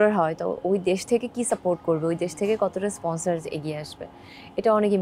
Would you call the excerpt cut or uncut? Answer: uncut